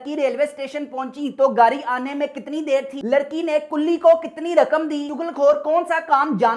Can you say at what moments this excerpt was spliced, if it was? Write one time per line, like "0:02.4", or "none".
0:03.0
0:05.2